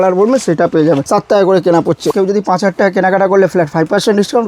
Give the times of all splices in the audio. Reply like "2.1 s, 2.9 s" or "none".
1.0 s, 2.1 s